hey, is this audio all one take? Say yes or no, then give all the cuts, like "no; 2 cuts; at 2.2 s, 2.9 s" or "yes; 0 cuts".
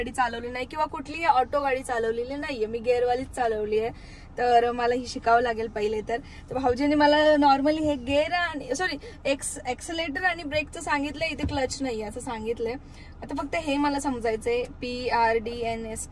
yes; 0 cuts